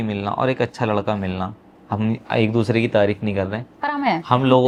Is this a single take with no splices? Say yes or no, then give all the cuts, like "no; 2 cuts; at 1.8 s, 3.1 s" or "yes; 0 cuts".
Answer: yes; 0 cuts